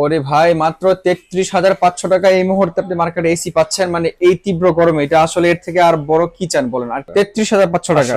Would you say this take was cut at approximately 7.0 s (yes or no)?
yes